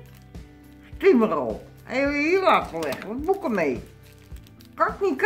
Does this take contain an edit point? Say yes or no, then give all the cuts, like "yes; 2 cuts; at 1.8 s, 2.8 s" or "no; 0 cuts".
no; 0 cuts